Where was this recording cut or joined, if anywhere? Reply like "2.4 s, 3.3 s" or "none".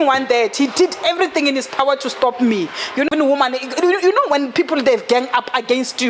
3.1 s